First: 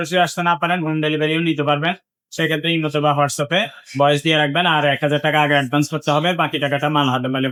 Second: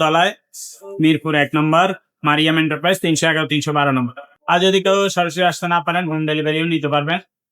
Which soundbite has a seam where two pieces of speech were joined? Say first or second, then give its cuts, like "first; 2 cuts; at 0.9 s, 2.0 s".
second; 1 cut; at 4.3 s